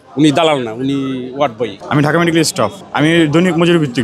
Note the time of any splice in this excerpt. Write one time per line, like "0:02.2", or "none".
0:01.8
0:02.8

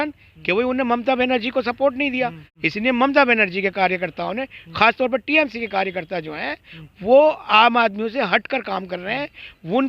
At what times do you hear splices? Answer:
0:02.5

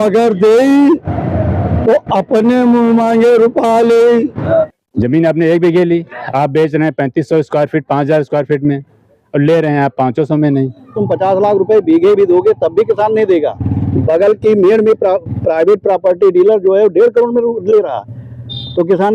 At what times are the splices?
0:04.4
0:11.0

